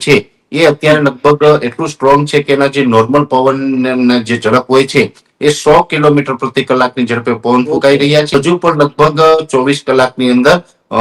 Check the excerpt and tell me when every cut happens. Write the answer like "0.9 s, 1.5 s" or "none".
8.3 s